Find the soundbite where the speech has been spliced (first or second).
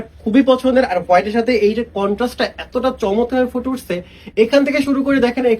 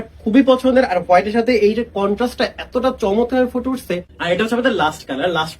second